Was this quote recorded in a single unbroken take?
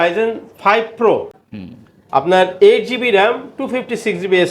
yes; 0 cuts

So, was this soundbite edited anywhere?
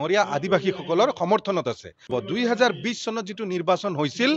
yes; 1 cut; at 2.2 s

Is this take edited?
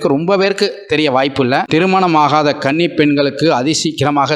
yes; 1 cut; at 1.7 s

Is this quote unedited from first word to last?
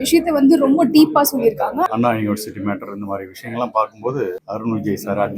no; 2 cuts; at 1.9 s, 4.4 s

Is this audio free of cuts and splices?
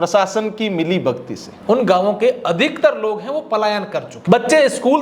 no; 2 cuts; at 1.5 s, 4.1 s

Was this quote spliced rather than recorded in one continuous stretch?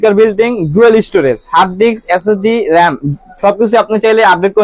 no; 0 cuts

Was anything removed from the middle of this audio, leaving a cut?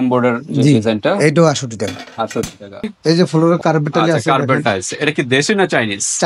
yes; 1 cut; at 2.9 s

